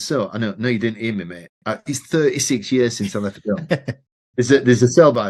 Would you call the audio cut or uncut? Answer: uncut